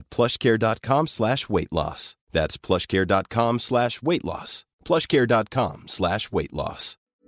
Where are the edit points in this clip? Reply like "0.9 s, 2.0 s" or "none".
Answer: none